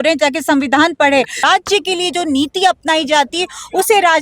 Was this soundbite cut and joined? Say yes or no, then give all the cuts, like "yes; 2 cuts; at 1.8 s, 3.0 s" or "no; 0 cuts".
yes; 1 cut; at 1.4 s